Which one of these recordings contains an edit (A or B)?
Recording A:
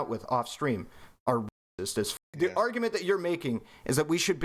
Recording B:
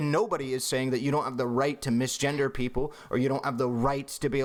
A